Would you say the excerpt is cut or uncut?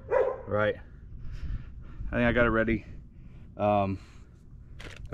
uncut